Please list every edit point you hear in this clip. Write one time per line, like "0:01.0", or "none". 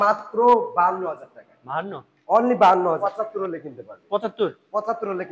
0:03.0